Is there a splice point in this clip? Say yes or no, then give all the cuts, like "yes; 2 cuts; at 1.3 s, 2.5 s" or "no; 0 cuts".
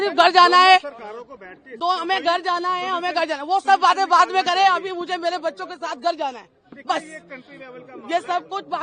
no; 0 cuts